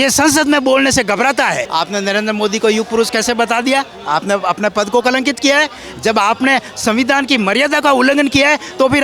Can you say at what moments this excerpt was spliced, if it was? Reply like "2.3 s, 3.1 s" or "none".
1.6 s